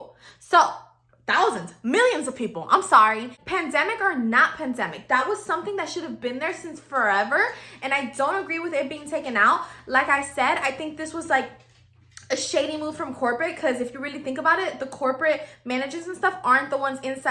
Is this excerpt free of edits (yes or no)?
no